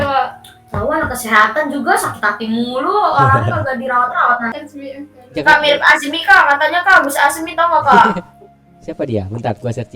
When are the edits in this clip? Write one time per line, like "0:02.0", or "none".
0:04.6